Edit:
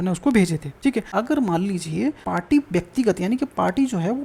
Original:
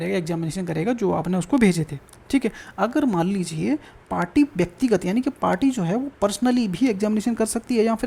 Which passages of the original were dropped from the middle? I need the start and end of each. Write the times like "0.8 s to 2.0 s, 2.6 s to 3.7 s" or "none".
2.2 s to 2.6 s, 3.9 s to 4.1 s